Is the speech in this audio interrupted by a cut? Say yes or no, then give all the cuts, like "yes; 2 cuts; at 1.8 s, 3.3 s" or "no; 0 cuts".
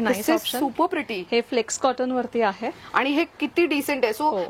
no; 0 cuts